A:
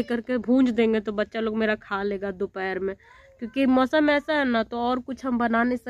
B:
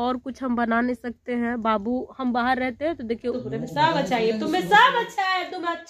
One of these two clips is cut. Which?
B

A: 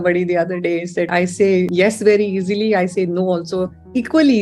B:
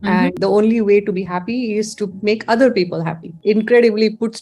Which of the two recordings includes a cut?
B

